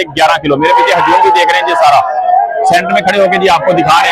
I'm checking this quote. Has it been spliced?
no; 0 cuts

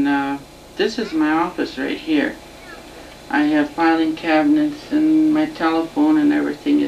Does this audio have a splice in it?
yes; 1 cut; at 4.9 s

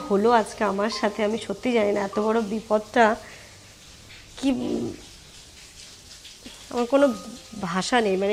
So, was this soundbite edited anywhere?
no; 0 cuts

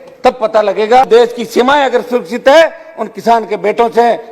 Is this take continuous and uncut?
no; 1 cut; at 1.1 s

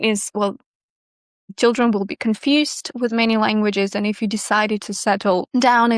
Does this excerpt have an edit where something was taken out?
yes; 1 cut; at 0.9 s

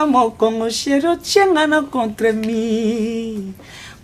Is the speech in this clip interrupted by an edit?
no; 0 cuts

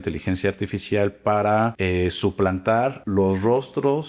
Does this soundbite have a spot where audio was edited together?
yes; 2 cuts; at 1.8 s, 3.0 s

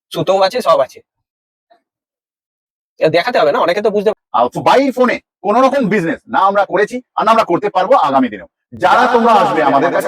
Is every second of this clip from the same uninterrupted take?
no; 1 cut; at 4.1 s

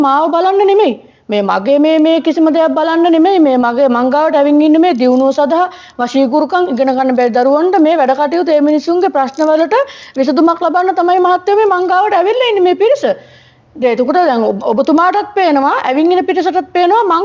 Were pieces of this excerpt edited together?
no; 0 cuts

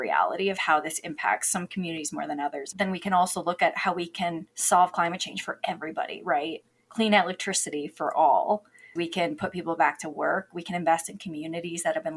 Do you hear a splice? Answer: yes; 3 cuts; at 2.7 s, 4.5 s, 8.9 s

